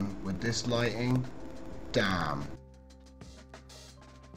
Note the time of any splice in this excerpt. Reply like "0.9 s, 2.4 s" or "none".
2.6 s